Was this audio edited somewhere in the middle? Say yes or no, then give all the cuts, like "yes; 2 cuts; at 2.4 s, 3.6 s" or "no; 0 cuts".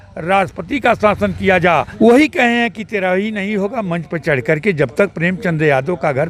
yes; 1 cut; at 1.9 s